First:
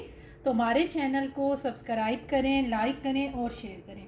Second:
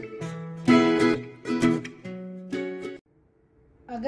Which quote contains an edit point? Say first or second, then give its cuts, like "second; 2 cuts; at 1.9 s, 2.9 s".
second; 1 cut; at 3.1 s